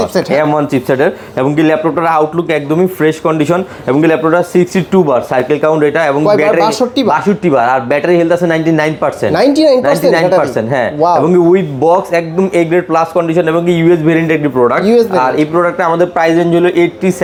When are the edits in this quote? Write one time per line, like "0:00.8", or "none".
none